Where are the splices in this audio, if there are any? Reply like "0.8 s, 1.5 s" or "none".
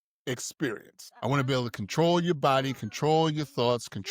1.0 s